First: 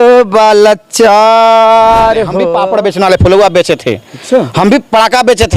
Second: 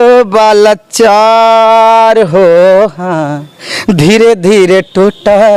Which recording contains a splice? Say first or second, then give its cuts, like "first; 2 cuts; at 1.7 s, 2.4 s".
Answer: first; 1 cut; at 2.4 s